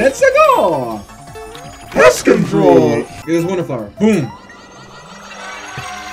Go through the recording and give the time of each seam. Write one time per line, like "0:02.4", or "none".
0:03.2